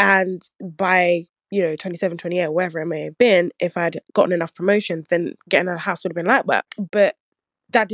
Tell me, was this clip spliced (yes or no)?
yes